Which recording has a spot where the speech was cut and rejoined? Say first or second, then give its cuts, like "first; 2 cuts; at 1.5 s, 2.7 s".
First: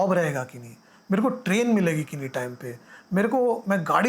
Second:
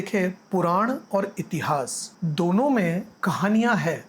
second; 2 cuts; at 2.1 s, 3.1 s